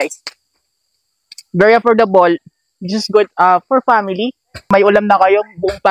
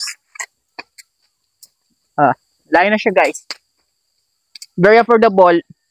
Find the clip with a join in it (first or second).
first